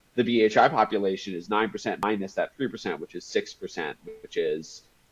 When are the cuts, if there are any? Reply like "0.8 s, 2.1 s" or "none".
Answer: 2.0 s